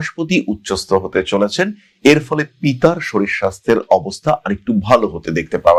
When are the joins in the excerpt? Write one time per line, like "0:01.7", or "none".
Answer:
none